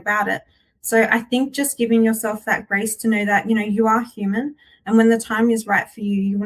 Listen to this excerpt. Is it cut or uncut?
uncut